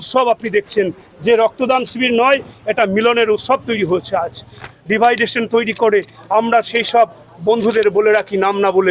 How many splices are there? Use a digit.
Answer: 1